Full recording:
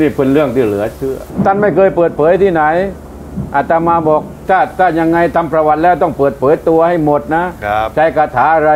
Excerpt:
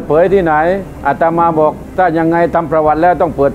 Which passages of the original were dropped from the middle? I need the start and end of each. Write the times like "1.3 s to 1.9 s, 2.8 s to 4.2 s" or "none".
3.0 s to 3.4 s, 4.4 s to 4.7 s